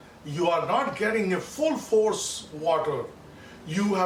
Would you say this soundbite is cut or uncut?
uncut